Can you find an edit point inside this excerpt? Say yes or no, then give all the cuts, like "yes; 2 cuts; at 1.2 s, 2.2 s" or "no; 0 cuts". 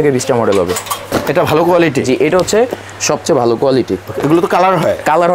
yes; 1 cut; at 0.9 s